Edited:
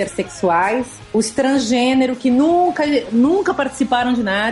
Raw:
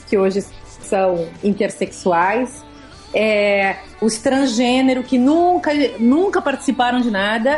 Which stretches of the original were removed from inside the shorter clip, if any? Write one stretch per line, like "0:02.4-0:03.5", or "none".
0:02.6-0:03.9